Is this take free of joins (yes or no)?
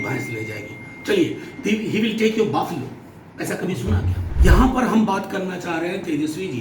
no